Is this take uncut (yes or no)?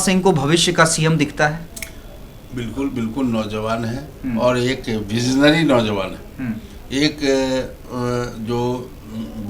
yes